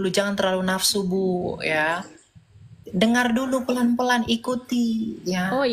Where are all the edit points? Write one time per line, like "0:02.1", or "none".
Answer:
none